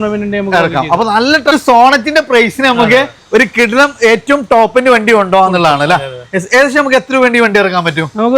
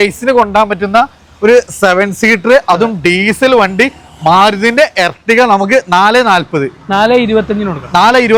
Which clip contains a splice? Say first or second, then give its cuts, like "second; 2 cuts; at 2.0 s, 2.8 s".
first; 1 cut; at 1.5 s